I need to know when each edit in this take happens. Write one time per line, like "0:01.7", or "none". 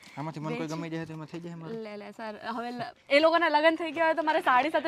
none